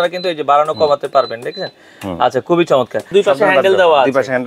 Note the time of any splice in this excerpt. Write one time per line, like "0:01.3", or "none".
0:03.1